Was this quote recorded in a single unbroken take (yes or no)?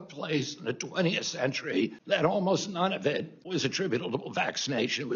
no